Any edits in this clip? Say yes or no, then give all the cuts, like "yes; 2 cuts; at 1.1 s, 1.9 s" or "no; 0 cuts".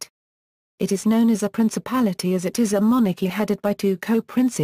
no; 0 cuts